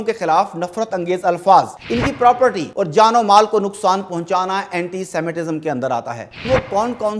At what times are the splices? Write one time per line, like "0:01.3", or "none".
0:01.8
0:02.6
0:06.4